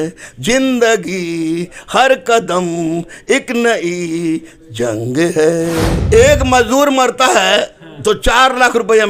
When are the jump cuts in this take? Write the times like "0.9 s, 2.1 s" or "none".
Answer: 6.0 s